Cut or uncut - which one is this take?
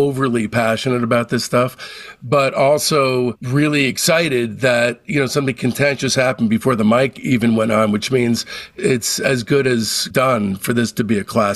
cut